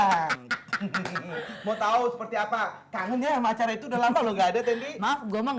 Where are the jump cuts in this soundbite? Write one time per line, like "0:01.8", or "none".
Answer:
none